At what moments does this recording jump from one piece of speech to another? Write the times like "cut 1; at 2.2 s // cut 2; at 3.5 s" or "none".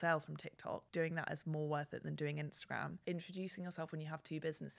cut 1; at 0.9 s // cut 2; at 3.0 s